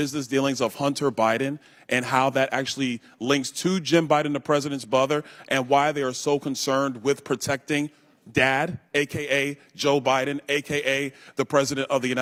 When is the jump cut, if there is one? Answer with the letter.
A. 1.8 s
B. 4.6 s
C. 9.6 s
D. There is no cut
D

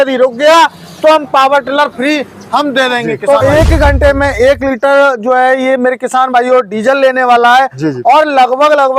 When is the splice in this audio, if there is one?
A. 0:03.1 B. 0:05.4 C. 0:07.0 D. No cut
A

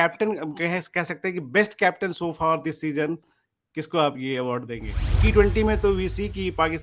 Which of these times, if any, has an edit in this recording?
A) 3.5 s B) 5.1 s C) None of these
B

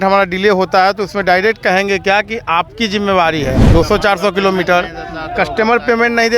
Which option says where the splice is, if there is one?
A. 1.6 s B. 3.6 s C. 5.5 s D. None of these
B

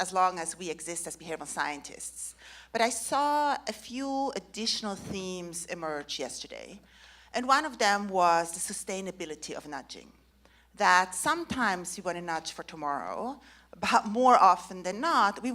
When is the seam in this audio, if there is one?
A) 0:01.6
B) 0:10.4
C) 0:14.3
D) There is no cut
C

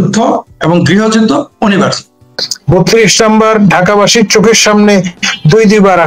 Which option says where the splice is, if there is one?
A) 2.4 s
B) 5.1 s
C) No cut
A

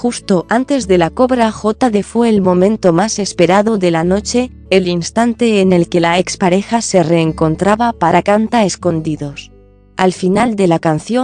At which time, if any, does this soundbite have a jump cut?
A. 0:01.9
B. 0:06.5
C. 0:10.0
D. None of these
D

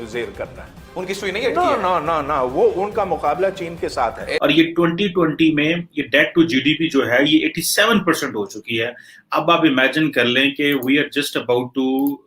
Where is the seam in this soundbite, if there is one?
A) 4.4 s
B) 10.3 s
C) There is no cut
A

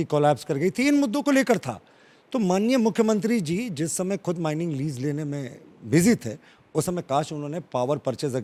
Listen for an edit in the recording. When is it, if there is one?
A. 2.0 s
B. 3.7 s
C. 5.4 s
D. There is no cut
D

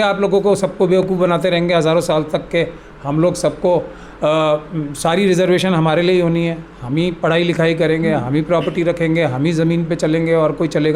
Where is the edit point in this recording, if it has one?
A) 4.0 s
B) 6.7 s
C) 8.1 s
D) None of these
D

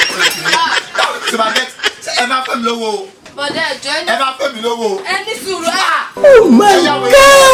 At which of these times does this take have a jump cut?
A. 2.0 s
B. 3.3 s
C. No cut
C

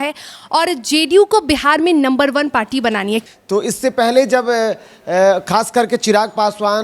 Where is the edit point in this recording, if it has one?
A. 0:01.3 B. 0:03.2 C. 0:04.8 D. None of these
B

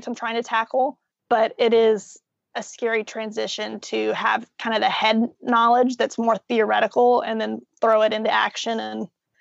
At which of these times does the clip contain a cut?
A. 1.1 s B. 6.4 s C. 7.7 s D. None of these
A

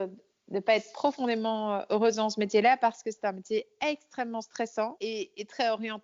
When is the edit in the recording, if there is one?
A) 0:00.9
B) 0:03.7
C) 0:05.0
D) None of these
C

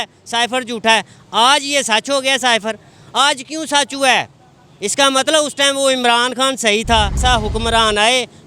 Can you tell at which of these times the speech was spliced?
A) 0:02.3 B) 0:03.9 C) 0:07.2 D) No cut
C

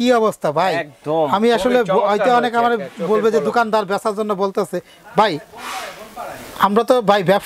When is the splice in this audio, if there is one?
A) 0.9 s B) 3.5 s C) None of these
C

